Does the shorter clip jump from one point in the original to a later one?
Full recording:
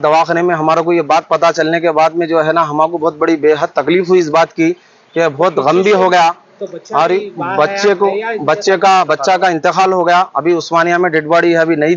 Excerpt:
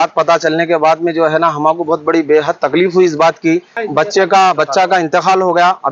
yes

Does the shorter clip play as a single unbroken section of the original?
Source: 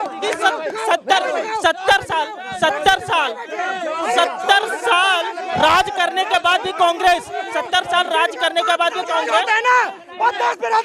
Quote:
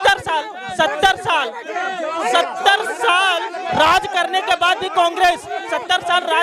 yes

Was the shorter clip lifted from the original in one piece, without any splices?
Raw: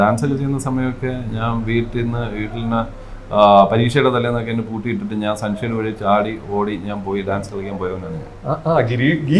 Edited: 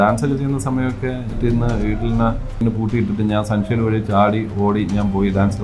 no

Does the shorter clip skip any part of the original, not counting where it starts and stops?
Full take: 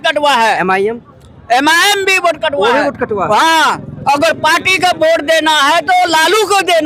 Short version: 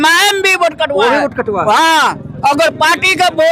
no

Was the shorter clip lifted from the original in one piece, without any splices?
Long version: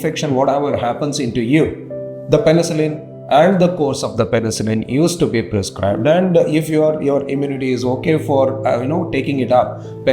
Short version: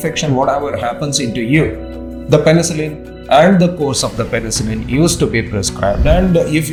yes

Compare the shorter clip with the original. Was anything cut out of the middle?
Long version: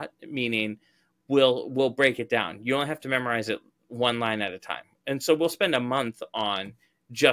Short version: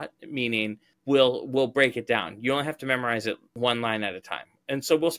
yes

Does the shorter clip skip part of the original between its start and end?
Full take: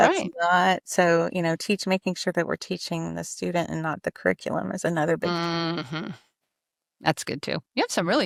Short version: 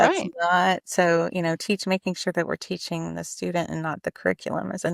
no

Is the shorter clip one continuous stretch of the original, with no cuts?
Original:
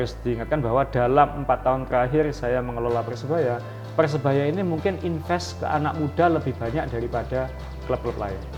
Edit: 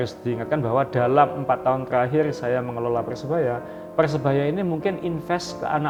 yes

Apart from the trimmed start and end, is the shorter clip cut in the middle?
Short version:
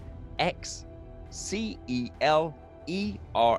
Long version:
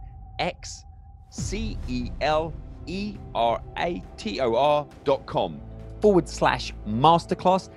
no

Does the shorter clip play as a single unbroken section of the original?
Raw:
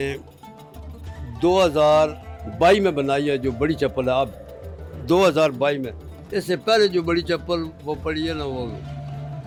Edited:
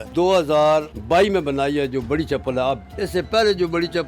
no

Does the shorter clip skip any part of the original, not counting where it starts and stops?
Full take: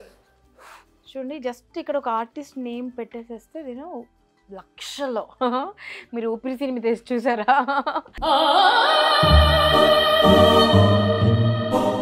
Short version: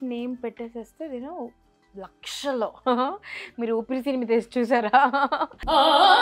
no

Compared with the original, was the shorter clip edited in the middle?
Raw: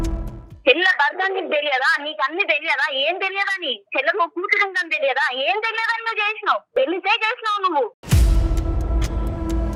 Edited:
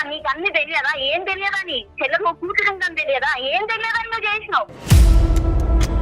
yes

